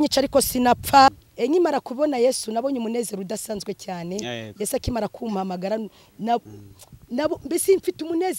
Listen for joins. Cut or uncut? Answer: cut